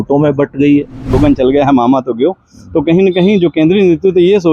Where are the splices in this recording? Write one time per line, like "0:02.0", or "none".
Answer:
0:01.1